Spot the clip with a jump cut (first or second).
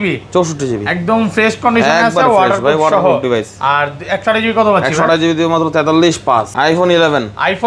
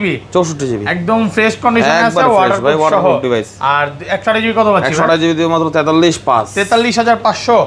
first